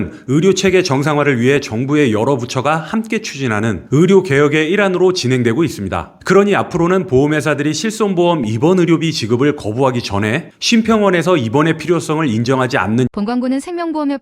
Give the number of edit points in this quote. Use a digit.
1